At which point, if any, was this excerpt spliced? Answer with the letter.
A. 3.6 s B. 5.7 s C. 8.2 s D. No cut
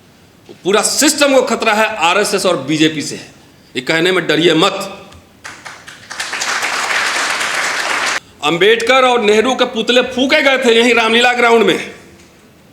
C